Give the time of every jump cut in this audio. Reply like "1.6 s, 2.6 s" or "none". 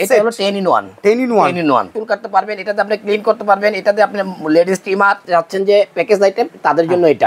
1.9 s, 5.2 s

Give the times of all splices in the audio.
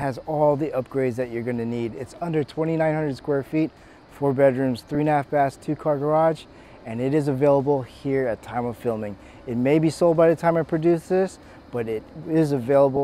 none

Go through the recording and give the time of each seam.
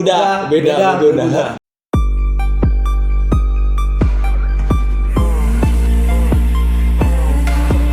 1.6 s

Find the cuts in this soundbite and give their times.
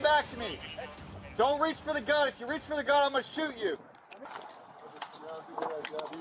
4.3 s

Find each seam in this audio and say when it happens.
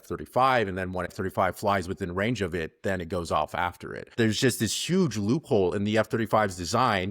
1.1 s, 4.2 s

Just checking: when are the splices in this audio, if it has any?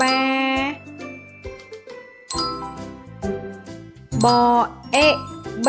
0.8 s, 4.2 s

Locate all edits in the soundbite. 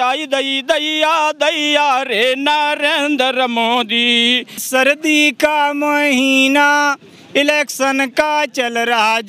4.6 s

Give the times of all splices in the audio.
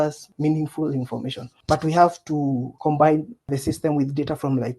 2.7 s, 3.5 s

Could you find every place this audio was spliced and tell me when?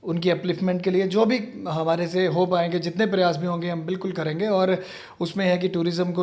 none

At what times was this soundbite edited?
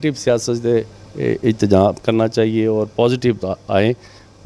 none

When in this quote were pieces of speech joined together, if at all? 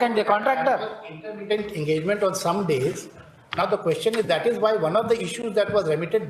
none

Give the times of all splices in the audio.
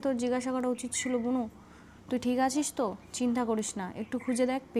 none

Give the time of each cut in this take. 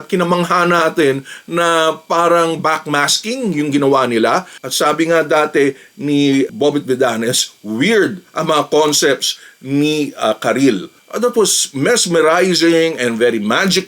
4.6 s, 11.0 s

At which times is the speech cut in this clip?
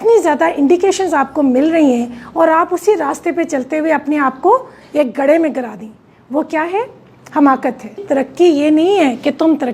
8.0 s

